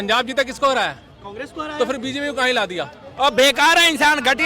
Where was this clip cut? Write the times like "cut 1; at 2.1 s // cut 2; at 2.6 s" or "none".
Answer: cut 1; at 3.1 s